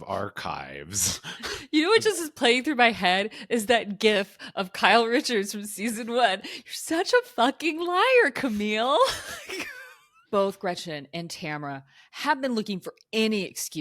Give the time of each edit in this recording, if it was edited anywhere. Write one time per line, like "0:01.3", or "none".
0:01.6
0:10.1